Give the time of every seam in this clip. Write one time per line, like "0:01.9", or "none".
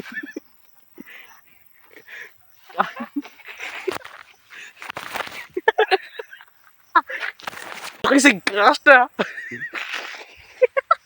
0:08.0

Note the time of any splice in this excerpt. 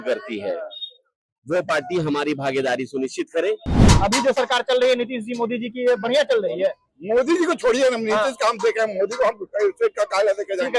0:03.7

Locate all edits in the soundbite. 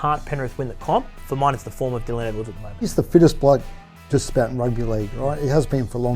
0:02.9

